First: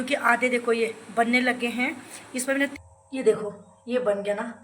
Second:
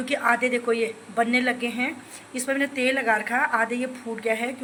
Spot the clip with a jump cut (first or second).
first